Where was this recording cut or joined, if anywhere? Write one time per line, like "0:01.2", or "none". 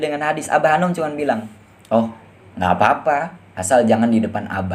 none